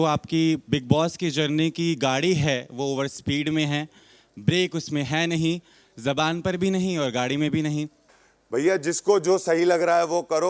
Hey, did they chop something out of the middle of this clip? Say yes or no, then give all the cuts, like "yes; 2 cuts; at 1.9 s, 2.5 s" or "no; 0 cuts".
yes; 1 cut; at 8.0 s